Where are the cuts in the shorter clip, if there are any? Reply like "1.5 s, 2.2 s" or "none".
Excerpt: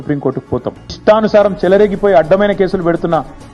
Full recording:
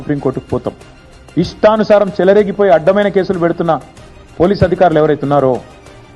1.0 s